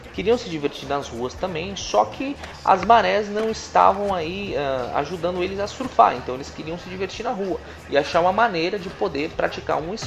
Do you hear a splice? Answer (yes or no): no